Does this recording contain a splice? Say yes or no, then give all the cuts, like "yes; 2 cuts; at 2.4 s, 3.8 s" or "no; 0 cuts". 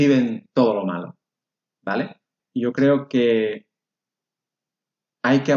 yes; 1 cut; at 2.4 s